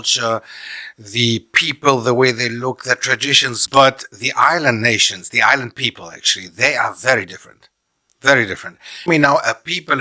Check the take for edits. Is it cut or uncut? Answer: cut